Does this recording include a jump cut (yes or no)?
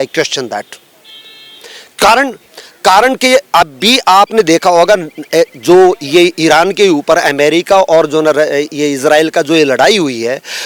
no